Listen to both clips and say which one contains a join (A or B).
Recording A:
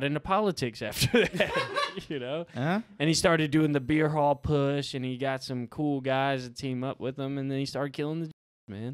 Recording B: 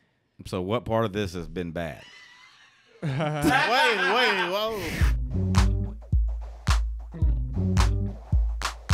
B